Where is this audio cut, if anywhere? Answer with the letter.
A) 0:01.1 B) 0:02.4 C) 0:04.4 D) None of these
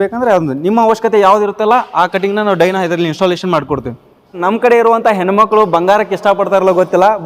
C